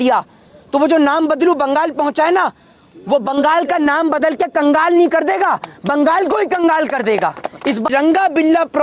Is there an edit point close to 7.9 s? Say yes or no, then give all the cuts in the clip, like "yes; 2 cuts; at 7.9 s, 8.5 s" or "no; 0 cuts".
yes; 1 cut; at 7.9 s